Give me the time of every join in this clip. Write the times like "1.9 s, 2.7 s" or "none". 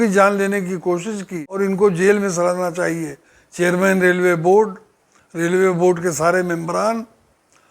1.5 s